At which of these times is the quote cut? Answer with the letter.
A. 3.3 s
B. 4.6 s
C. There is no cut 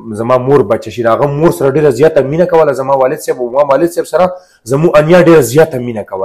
C